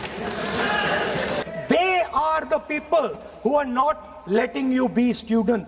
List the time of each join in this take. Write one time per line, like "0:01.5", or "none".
0:01.4